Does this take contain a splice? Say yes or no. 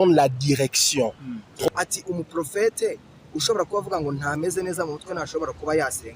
yes